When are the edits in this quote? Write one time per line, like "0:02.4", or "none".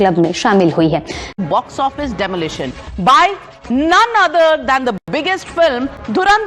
0:01.2